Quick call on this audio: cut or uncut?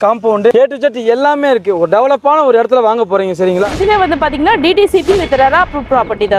cut